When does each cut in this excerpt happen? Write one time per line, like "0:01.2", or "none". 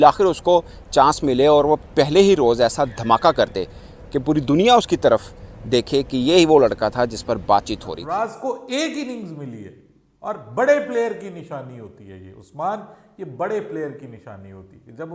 0:08.0